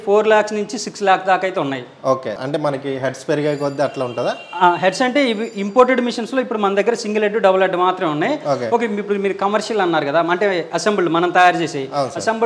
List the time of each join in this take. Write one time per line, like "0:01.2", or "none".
none